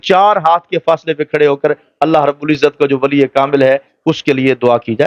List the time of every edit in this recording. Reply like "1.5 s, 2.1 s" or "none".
none